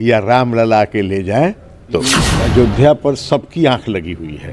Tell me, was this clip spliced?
yes; 1 cut; at 2.3 s

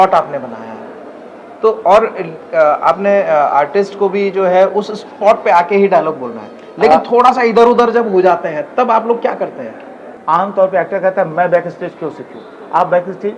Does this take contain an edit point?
yes; 1 cut; at 10.1 s

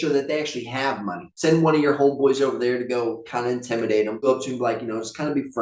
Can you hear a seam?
yes; 2 cuts; at 1.3 s, 4.3 s

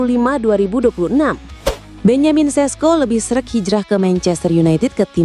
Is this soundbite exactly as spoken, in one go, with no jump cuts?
no; 1 cut; at 1.8 s

